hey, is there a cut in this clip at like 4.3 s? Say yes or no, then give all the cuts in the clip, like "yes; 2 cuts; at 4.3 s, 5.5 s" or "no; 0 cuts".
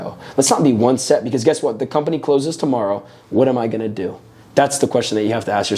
no; 0 cuts